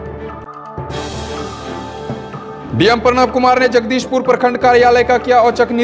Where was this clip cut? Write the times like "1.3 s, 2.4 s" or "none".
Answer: 2.4 s